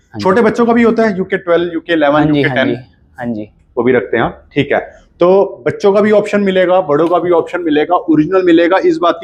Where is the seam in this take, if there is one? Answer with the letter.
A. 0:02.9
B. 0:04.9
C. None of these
C